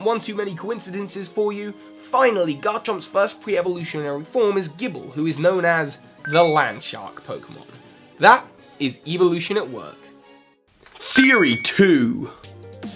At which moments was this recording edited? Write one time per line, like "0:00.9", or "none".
0:03.0